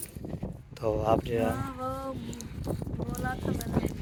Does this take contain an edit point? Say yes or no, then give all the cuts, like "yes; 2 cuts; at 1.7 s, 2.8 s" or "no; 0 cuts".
no; 0 cuts